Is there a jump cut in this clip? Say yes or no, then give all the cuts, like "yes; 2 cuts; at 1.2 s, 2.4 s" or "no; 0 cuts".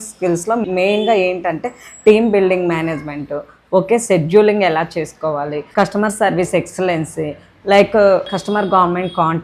no; 0 cuts